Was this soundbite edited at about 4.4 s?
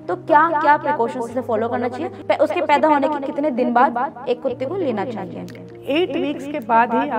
no; 2 cuts; at 2.1 s, 5.7 s

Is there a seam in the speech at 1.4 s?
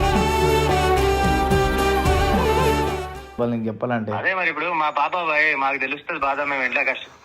no; 1 cut; at 3.3 s

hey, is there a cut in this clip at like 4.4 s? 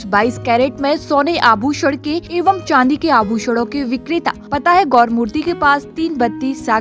yes; 2 cuts; at 2.2 s, 4.4 s

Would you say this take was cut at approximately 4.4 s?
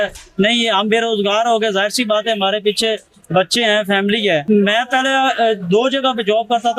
yes; 1 cut; at 4.4 s

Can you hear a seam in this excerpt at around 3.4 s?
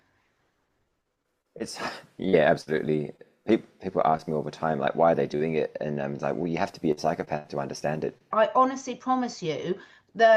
no; 1 cut; at 8.3 s

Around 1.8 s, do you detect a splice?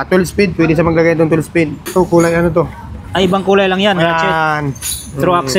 yes; 1 cut; at 1.8 s

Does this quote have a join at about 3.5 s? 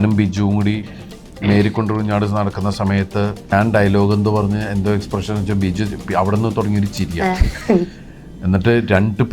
yes; 1 cut; at 3.5 s

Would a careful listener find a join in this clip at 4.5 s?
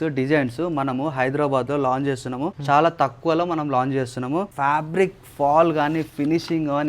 yes; 2 cuts; at 2.6 s, 4.5 s

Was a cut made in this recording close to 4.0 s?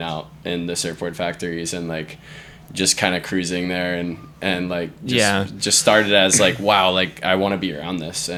no; 0 cuts

